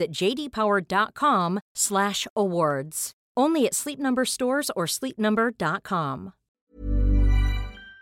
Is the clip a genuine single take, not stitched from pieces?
no; 1 cut; at 6.6 s

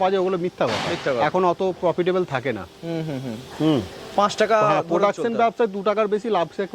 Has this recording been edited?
no; 0 cuts

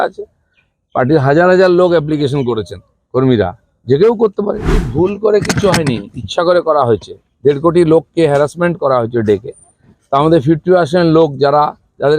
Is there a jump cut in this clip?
yes; 1 cut; at 4.8 s

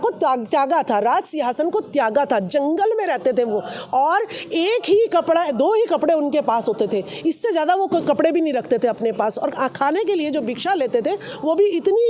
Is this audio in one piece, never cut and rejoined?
yes; 0 cuts

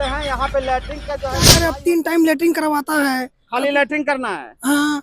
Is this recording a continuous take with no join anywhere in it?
no; 1 cut; at 1.6 s

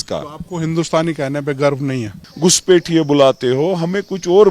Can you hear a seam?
yes; 1 cut; at 2.1 s

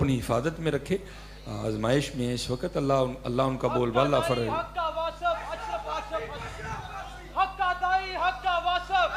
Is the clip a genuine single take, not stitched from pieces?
yes; 0 cuts

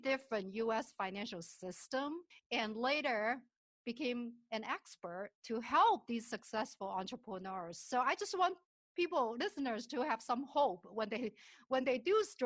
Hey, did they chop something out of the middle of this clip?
yes; 1 cut; at 2.3 s

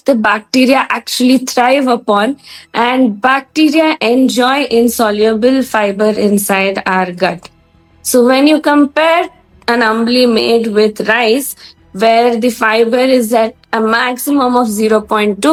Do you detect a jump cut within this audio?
no; 0 cuts

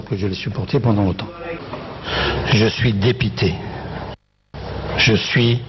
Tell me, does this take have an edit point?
yes; 1 cut; at 1.5 s

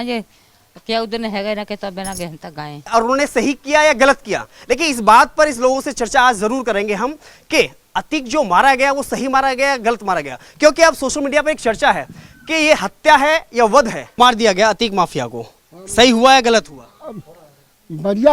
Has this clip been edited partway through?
yes; 2 cuts; at 2.8 s, 14.2 s

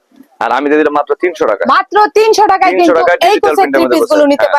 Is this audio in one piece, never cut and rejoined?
yes; 0 cuts

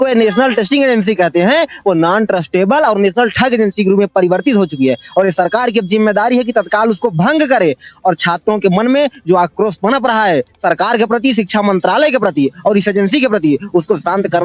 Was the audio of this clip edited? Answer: no; 0 cuts

